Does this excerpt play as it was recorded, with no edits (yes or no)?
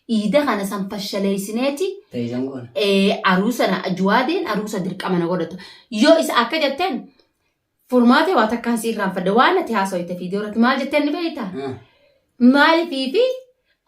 yes